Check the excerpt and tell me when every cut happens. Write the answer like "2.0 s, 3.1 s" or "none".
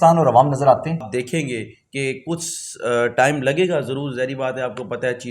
1.1 s